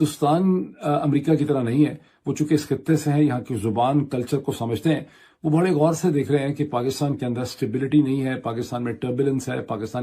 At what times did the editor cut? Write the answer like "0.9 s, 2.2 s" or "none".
none